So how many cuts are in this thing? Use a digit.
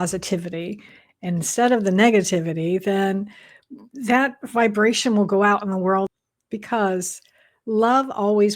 1